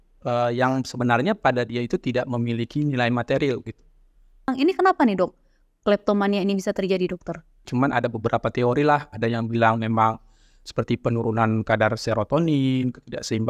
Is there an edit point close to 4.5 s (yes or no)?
yes